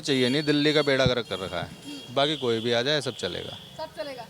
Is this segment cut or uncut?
uncut